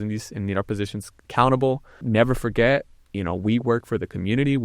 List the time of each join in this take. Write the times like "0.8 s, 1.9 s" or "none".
2.0 s